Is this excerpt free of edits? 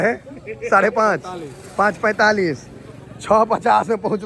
yes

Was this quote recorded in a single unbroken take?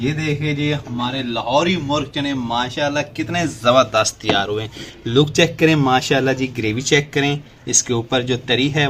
yes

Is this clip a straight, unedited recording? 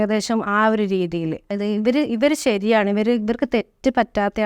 no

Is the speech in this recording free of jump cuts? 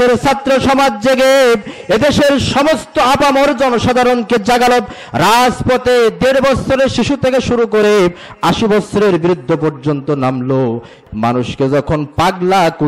no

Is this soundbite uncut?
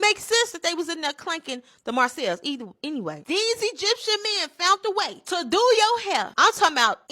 no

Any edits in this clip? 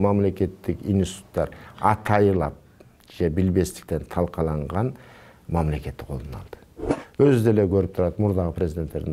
yes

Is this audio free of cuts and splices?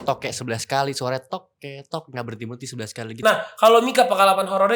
no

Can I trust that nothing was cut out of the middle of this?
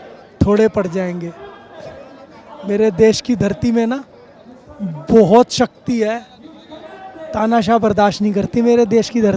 yes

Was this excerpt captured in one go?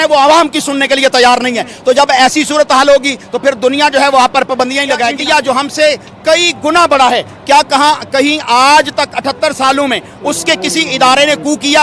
no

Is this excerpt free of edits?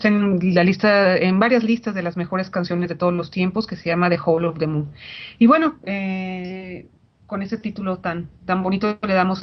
no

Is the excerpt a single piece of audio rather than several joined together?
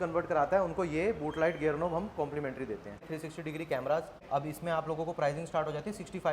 no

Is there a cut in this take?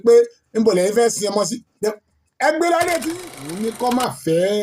yes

